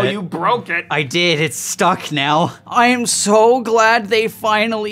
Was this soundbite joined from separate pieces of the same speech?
yes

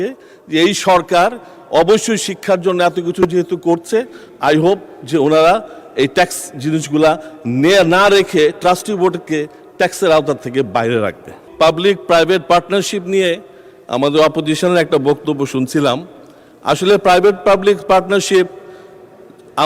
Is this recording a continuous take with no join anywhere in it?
no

